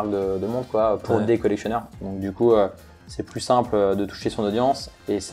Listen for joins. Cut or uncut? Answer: uncut